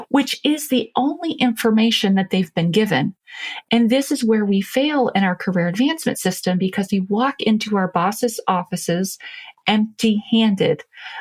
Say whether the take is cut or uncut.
uncut